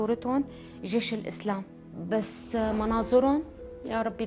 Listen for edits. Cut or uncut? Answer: cut